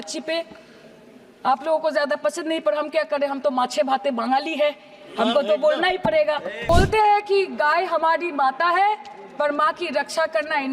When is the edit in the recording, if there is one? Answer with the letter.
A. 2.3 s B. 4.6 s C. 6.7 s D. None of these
C